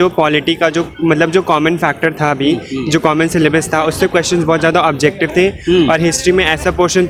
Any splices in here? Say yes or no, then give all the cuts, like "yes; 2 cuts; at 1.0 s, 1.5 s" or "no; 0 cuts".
no; 0 cuts